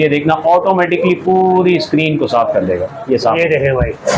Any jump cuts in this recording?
no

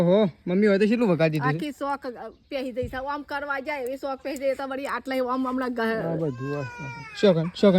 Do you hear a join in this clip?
no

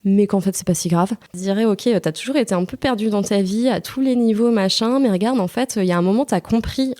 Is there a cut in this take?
yes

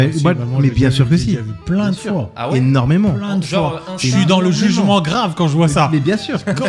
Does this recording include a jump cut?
no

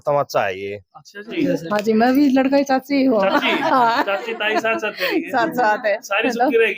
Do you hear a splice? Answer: yes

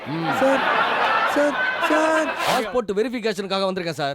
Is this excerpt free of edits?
no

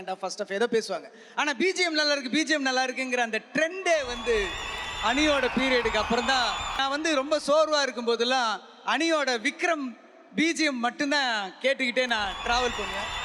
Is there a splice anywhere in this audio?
yes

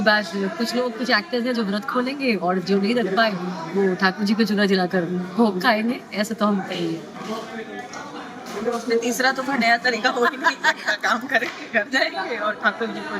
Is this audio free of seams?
yes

